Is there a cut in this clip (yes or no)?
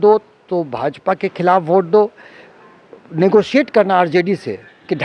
no